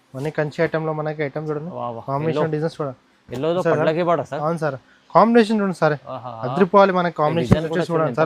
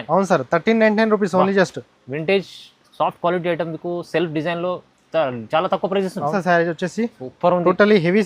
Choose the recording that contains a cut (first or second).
second